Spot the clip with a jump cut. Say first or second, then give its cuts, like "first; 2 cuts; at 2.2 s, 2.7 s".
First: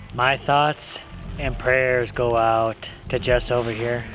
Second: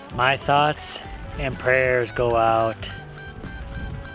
first; 1 cut; at 2.9 s